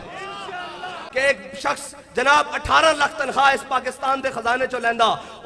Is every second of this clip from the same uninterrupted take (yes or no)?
no